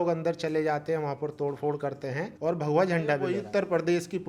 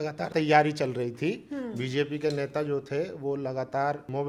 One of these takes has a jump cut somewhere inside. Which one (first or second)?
first